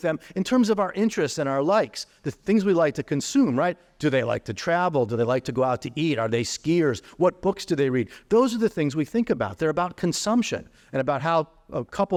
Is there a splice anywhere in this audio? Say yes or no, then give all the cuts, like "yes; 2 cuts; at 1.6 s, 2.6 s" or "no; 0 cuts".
no; 0 cuts